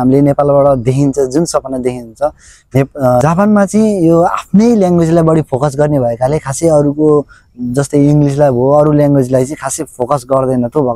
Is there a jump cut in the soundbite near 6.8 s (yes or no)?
no